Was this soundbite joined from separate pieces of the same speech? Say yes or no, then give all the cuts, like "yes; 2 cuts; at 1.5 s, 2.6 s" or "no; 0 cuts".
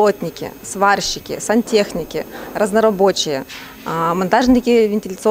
no; 0 cuts